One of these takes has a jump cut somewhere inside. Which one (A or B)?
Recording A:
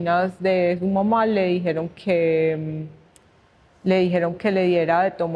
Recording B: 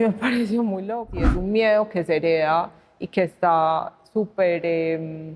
B